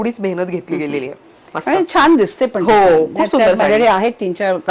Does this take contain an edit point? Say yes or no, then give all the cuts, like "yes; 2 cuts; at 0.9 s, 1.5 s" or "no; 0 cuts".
no; 0 cuts